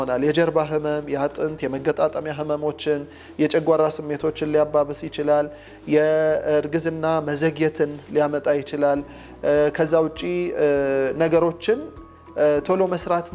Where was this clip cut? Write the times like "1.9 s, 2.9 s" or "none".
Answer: none